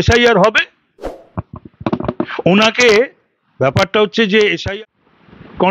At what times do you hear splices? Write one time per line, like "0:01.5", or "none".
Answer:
0:04.6